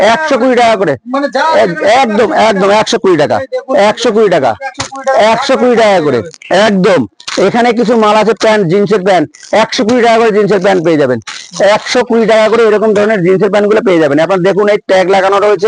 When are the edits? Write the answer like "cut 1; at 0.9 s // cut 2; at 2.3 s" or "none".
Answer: none